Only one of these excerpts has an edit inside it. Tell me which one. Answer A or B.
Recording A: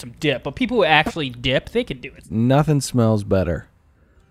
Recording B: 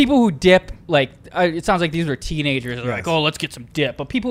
A